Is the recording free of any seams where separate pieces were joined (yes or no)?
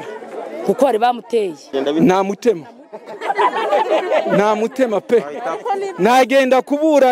no